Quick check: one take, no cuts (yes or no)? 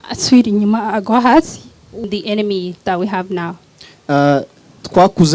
no